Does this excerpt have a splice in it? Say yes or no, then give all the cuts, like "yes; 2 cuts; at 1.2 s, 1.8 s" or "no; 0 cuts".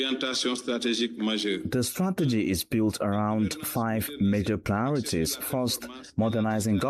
no; 0 cuts